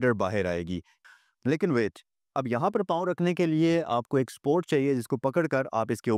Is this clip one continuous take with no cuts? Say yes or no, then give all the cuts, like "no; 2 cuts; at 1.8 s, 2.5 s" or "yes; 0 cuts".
no; 1 cut; at 0.9 s